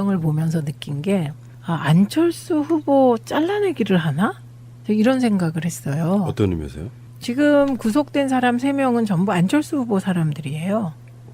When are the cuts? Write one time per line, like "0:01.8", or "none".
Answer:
none